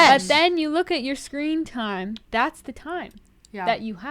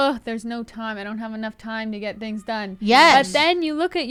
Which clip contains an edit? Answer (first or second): first